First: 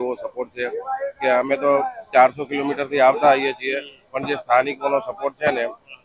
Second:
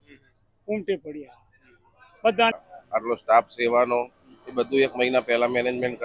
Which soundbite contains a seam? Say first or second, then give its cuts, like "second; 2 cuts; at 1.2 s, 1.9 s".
second; 1 cut; at 2.7 s